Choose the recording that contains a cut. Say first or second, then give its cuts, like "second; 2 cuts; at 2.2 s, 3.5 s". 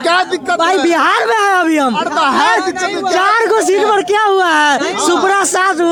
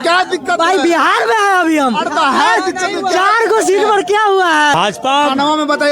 second; 1 cut; at 4.7 s